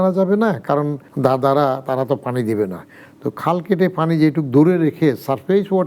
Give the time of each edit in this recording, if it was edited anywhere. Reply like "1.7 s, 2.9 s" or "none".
1.0 s